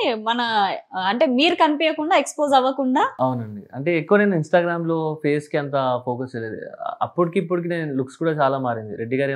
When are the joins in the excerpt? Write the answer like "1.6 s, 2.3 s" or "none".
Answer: 3.1 s

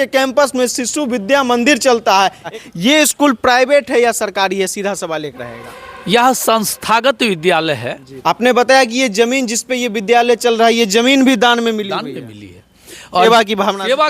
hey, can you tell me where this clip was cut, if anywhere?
2.5 s, 8.1 s, 13.2 s

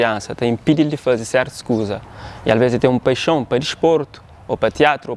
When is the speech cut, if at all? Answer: none

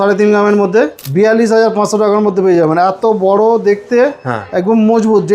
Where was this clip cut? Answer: 1.0 s

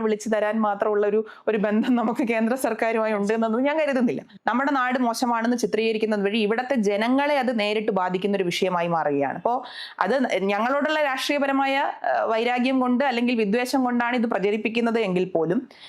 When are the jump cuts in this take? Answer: 4.3 s

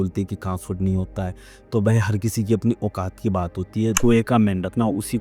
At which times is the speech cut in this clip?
4.0 s

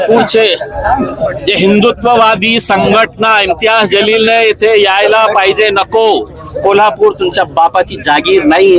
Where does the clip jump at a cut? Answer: none

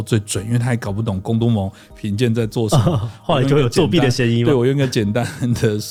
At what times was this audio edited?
none

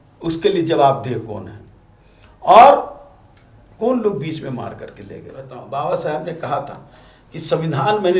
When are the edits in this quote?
5.6 s

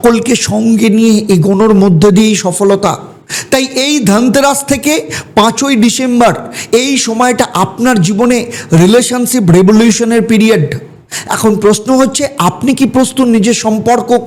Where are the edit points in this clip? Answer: none

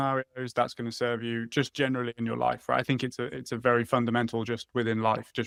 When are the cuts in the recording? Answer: none

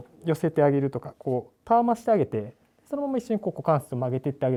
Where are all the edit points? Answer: none

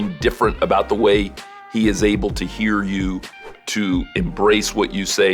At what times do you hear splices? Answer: none

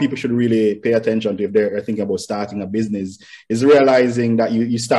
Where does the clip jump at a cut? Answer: none

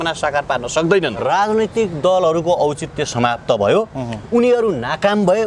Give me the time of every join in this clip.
1.2 s

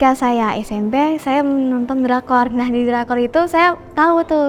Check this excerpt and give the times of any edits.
none

